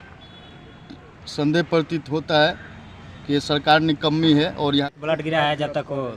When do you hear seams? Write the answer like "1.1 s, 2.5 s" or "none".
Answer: 4.8 s

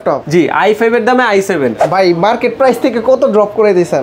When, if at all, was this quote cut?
1.8 s

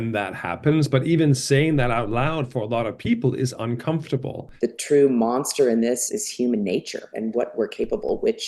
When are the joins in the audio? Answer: 4.4 s, 6.0 s, 7.1 s

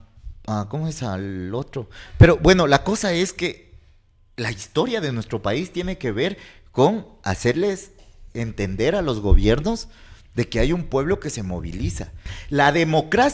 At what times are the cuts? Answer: 12.2 s

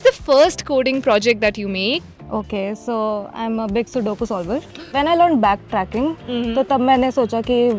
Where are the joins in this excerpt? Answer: 2.1 s, 4.9 s

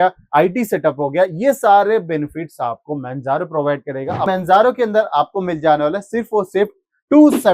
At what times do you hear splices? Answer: 4.3 s

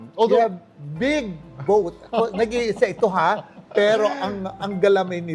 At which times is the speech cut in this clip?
none

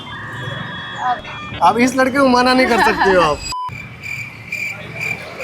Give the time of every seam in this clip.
3.5 s

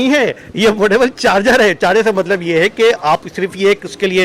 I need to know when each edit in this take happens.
none

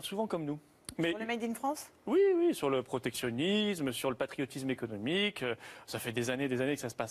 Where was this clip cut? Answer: 1.6 s

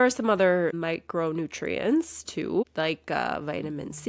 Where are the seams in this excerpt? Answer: 0.8 s, 2.6 s

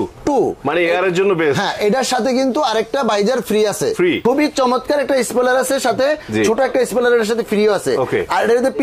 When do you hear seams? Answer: 4.2 s

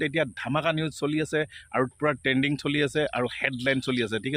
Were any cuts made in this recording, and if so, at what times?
none

